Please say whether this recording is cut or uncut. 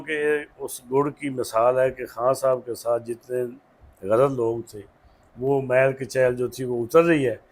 uncut